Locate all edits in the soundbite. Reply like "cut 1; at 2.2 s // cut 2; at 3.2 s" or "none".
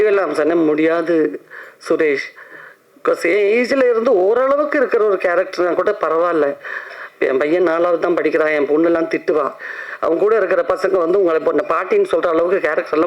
none